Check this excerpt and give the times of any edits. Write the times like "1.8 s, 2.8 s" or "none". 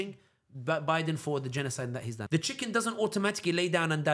2.2 s